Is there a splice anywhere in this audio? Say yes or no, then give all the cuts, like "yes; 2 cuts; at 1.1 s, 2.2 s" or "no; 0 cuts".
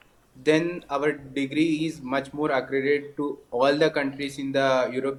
no; 0 cuts